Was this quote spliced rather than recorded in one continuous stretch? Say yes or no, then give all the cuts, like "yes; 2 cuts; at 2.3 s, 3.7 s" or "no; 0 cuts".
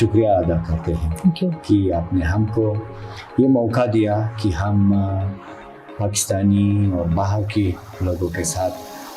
no; 0 cuts